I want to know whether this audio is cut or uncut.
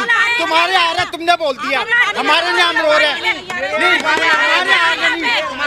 uncut